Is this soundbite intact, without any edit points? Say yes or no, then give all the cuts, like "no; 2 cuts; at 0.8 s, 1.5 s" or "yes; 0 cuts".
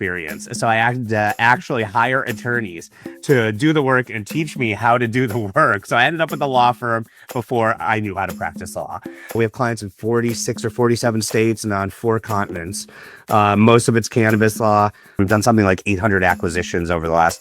no; 2 cuts; at 9.4 s, 15.2 s